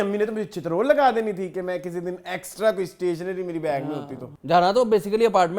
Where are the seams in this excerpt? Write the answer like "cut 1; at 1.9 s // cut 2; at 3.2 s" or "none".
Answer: cut 1; at 4.3 s